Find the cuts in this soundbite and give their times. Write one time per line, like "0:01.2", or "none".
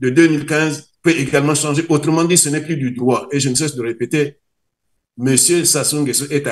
none